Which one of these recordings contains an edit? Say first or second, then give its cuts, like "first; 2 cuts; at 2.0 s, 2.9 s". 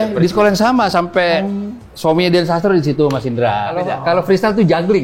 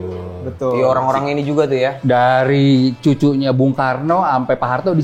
first; 1 cut; at 3.9 s